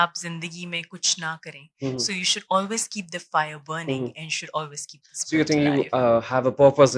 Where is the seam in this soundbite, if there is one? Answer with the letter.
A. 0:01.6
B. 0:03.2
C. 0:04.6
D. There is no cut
D